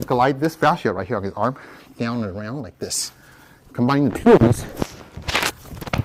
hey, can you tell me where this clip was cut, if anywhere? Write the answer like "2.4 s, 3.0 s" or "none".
none